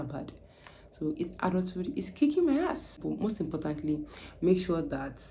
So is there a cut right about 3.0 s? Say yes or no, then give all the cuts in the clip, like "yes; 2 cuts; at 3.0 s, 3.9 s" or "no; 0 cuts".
yes; 1 cut; at 3.0 s